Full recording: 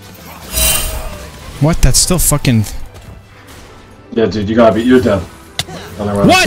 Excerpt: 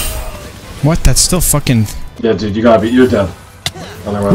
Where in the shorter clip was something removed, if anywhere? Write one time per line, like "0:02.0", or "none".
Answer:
0:02.0